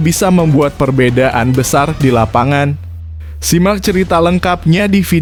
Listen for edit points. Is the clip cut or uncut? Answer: uncut